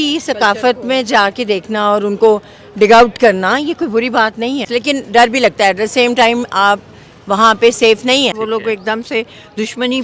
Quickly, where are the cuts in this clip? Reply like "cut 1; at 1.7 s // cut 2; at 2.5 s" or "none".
cut 1; at 4.7 s // cut 2; at 8.4 s

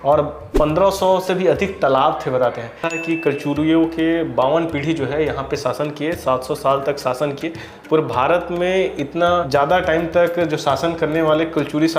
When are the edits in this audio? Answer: cut 1; at 2.9 s // cut 2; at 9.4 s

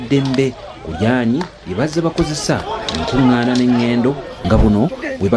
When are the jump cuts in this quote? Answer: cut 1; at 4.3 s

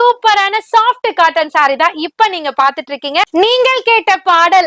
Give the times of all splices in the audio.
cut 1; at 3.3 s

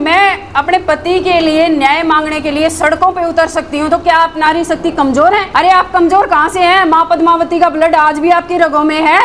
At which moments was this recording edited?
cut 1; at 5.5 s

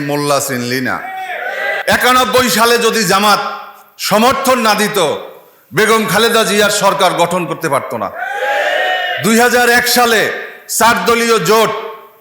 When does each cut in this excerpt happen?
cut 1; at 1.8 s

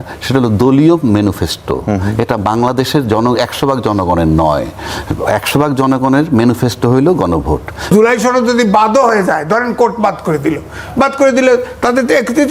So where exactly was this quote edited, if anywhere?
cut 1; at 7.9 s

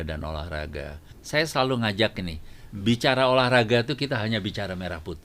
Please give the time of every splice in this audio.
cut 1; at 1.1 s

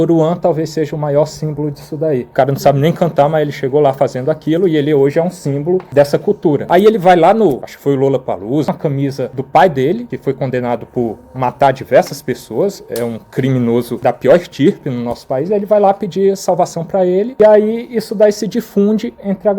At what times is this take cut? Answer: cut 1; at 2.3 s // cut 2; at 8.7 s // cut 3; at 17.3 s

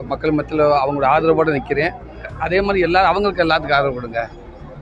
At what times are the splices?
none

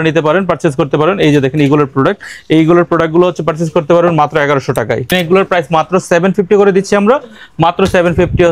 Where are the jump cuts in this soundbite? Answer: cut 1; at 5.1 s

